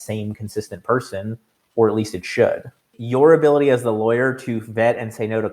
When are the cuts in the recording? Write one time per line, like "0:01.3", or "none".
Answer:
0:02.9